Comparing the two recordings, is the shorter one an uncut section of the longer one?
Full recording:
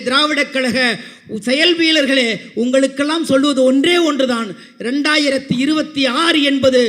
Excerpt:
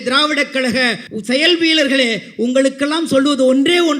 no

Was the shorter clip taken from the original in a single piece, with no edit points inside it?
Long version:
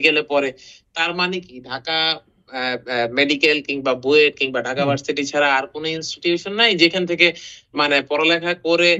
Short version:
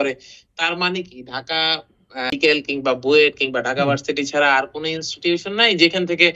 no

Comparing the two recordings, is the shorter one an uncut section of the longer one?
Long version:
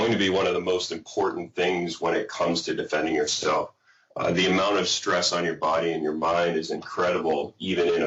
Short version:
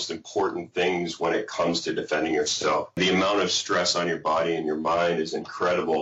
no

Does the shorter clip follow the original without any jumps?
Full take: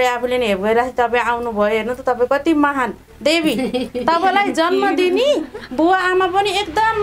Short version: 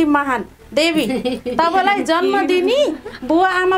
yes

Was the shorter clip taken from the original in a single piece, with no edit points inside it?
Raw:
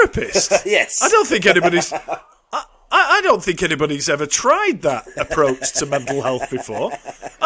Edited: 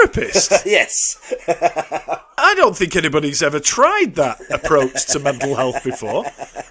no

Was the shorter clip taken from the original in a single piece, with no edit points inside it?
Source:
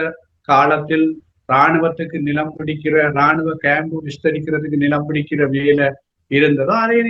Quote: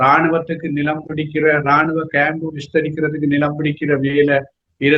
yes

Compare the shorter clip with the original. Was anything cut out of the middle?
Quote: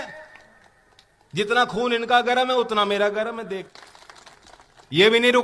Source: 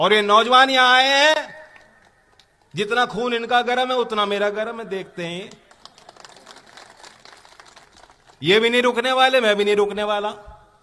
yes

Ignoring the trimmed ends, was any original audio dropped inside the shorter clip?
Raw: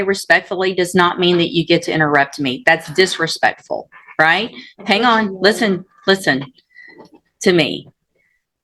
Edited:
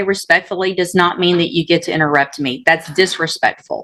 no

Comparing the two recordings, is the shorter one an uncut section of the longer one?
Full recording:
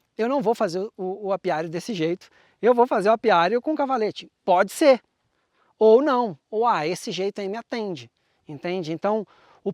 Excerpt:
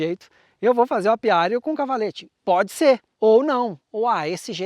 no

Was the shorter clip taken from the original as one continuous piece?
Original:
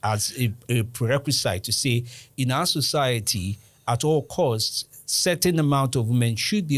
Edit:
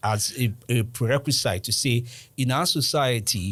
yes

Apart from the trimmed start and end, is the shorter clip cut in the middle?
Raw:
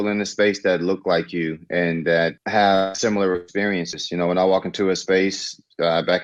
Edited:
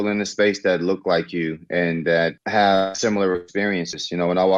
no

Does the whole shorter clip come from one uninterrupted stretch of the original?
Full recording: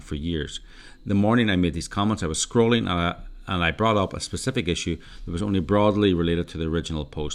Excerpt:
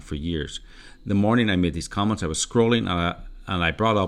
yes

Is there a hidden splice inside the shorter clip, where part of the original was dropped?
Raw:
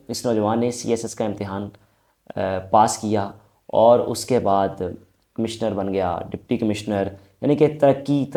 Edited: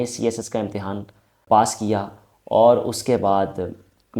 yes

